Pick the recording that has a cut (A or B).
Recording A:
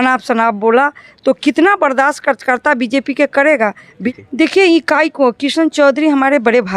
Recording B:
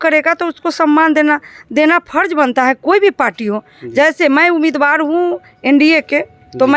A